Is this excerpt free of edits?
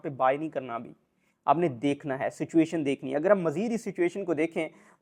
yes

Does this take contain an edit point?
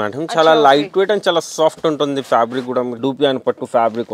yes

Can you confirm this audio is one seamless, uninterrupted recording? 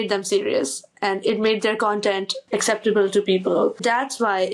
no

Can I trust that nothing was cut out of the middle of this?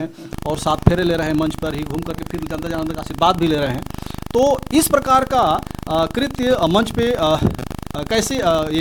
yes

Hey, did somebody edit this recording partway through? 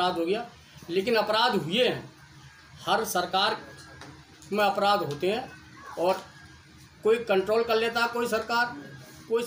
no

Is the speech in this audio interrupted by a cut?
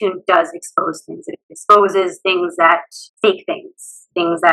yes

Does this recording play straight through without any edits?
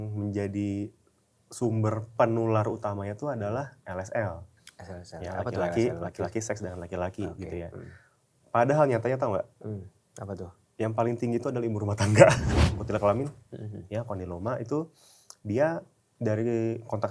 no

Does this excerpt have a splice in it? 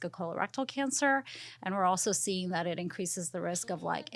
no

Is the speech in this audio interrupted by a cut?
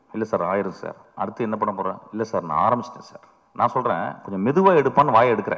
yes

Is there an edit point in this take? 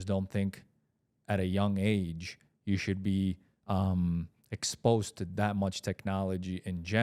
no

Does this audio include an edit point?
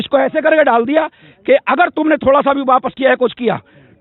no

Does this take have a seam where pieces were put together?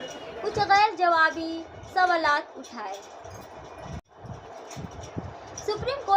yes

